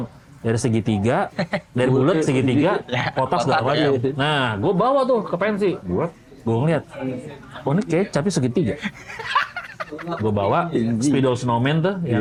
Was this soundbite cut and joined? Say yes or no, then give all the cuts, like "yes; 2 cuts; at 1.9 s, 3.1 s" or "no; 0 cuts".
no; 0 cuts